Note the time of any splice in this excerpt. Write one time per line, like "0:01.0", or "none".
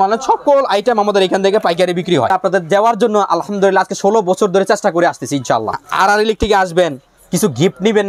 0:02.3
0:05.8